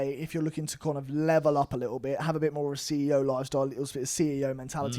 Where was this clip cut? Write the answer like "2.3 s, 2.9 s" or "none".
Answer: none